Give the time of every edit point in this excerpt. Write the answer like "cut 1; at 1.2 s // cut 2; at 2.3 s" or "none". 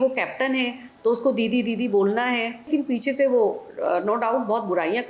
cut 1; at 2.7 s